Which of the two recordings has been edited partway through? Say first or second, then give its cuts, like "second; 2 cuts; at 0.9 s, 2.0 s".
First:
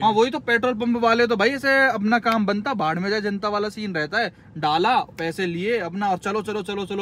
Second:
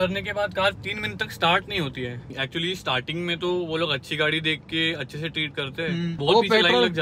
second; 2 cuts; at 2.4 s, 6.1 s